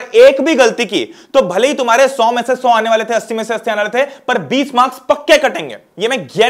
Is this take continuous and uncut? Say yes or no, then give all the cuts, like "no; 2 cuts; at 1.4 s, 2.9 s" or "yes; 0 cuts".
yes; 0 cuts